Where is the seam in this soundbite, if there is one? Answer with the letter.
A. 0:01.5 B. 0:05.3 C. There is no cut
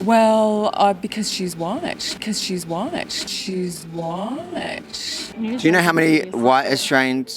B